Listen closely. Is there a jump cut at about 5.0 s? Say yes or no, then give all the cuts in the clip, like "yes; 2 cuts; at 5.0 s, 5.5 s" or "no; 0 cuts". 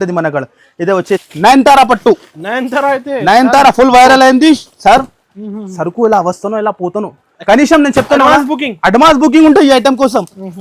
no; 1 cut; at 1.3 s